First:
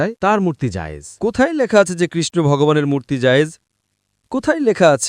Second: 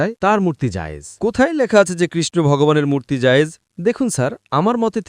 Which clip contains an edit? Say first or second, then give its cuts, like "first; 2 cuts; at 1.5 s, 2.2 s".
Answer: second; 1 cut; at 3.7 s